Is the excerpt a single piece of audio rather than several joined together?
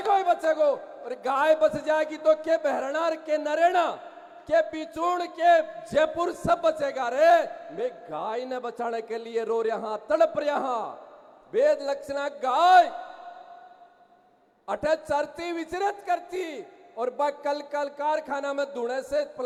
yes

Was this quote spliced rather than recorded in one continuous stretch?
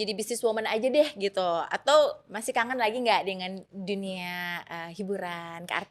no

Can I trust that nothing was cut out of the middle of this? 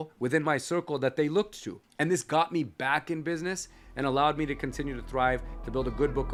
yes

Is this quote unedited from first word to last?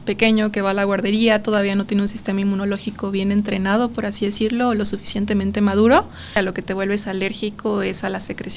no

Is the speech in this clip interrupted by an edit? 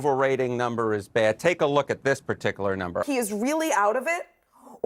yes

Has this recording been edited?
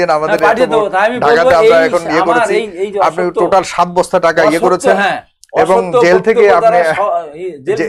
no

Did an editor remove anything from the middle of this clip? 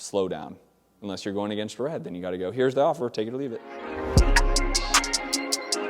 yes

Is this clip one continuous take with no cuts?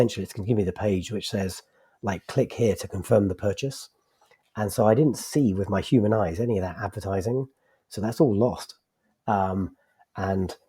yes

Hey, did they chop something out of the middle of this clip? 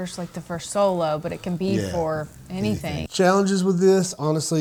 no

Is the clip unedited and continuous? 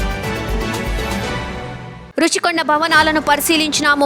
no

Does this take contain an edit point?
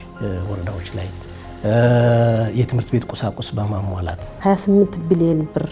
yes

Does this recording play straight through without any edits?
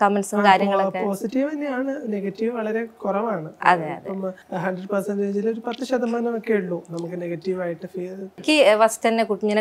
no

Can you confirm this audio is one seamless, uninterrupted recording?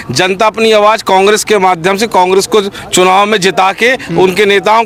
yes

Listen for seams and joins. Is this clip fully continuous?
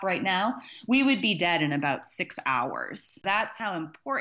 no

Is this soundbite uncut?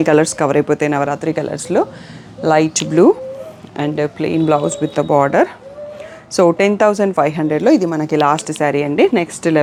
yes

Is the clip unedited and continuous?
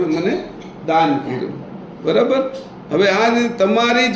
yes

